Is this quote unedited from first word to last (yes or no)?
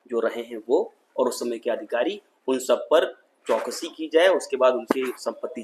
yes